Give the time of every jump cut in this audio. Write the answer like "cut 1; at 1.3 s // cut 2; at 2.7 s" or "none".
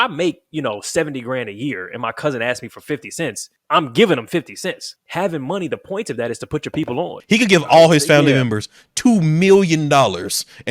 cut 1; at 3.5 s // cut 2; at 4.9 s // cut 3; at 7.2 s